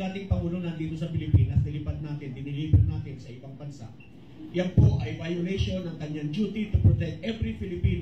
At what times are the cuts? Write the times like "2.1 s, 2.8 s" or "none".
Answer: none